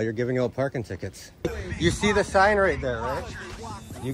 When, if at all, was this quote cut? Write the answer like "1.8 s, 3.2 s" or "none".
1.4 s

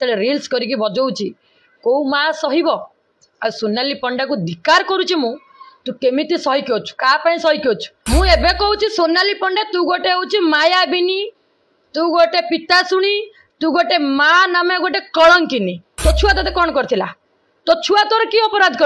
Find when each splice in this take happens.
7.9 s, 15.8 s

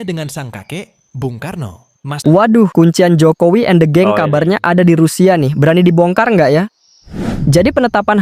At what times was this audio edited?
2.1 s

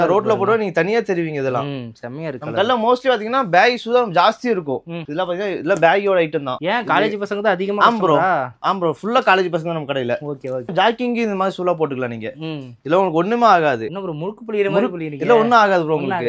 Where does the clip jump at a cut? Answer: none

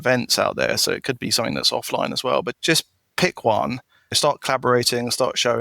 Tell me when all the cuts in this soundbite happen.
2.5 s, 4.2 s

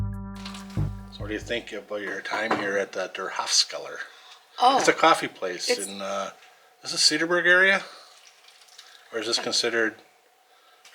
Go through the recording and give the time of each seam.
1.1 s

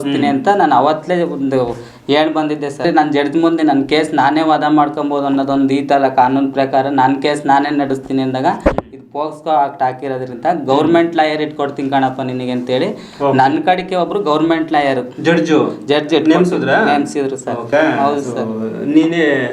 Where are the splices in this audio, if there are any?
2.8 s, 17.7 s

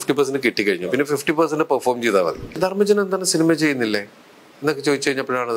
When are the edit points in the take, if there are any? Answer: 2.6 s

